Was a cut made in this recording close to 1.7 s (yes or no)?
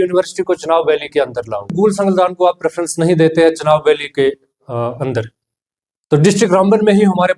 yes